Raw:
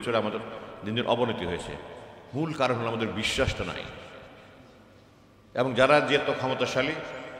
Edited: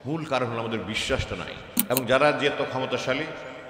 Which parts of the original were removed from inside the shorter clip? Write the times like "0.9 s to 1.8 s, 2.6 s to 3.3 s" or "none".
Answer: 3.9 s to 5.3 s